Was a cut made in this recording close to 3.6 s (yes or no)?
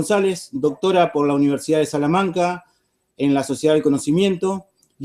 no